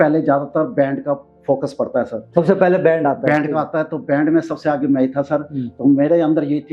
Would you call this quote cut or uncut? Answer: uncut